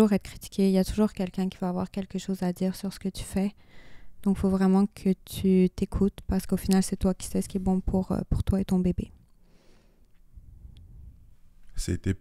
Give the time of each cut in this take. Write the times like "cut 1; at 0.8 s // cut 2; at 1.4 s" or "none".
none